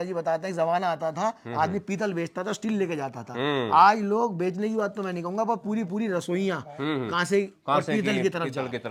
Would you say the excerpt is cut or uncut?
uncut